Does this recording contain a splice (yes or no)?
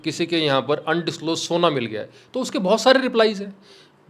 no